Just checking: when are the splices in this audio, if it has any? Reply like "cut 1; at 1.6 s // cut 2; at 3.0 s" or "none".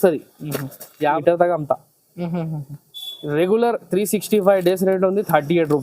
cut 1; at 1.0 s